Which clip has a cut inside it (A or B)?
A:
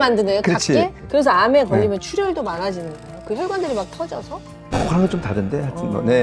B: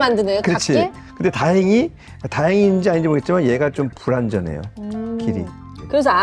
A